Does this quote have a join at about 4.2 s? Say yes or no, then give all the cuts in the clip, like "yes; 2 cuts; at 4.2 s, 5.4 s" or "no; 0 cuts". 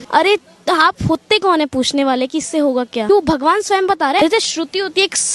yes; 2 cuts; at 3.1 s, 4.2 s